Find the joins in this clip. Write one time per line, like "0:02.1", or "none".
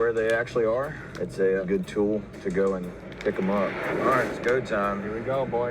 0:01.6
0:03.9